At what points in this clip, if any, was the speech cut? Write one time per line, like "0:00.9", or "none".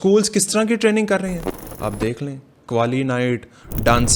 none